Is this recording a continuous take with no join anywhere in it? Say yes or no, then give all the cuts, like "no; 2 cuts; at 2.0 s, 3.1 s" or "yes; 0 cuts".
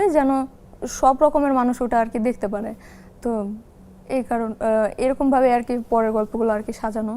yes; 0 cuts